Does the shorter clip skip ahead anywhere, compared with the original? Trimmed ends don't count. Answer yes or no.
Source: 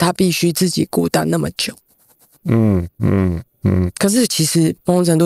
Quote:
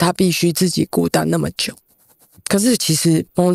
yes